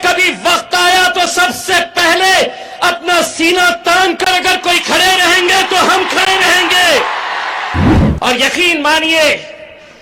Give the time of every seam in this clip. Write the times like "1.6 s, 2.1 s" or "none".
8.0 s